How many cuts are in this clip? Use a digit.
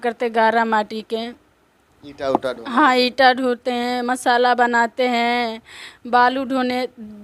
0